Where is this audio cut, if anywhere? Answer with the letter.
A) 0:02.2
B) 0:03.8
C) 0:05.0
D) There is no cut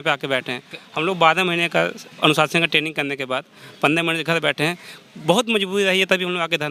D